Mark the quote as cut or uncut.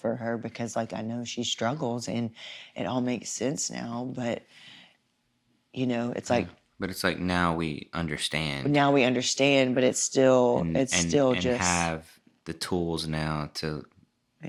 uncut